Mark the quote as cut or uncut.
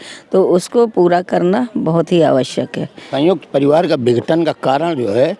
cut